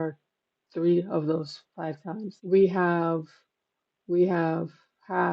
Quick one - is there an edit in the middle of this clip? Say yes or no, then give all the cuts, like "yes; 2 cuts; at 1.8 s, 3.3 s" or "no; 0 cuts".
yes; 1 cut; at 2.3 s